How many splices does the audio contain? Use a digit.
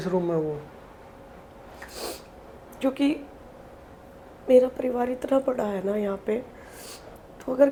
0